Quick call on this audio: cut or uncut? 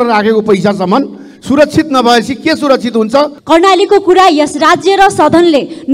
cut